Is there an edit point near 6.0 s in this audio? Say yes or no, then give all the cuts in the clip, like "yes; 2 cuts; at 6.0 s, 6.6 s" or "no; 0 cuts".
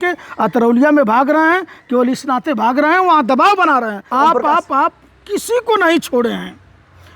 no; 1 cut; at 4.1 s